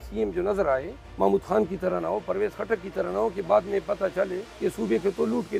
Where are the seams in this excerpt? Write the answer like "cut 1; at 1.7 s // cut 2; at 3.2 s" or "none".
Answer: cut 1; at 1.0 s // cut 2; at 4.5 s